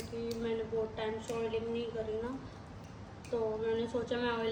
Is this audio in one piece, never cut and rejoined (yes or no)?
yes